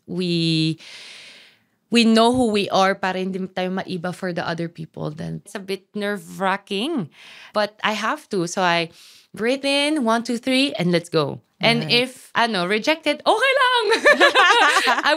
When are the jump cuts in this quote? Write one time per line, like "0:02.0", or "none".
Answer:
0:05.5
0:07.5
0:12.2